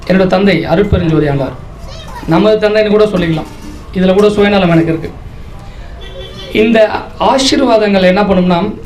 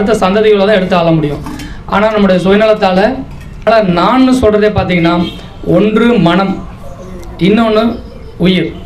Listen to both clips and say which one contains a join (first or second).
second